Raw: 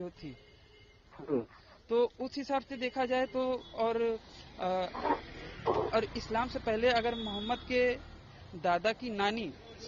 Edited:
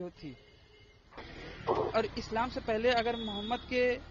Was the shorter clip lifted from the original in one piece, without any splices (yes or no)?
no